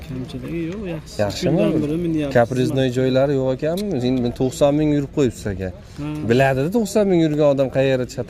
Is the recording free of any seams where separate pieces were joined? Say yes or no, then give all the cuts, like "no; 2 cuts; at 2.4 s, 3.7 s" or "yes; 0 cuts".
yes; 0 cuts